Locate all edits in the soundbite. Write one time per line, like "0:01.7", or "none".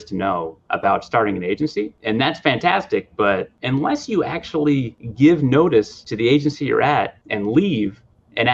0:02.0
0:03.5
0:05.0
0:06.0
0:07.2